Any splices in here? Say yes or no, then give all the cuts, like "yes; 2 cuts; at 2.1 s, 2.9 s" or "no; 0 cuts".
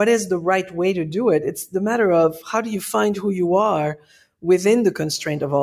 no; 0 cuts